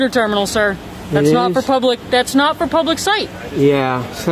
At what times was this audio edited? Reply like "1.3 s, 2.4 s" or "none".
none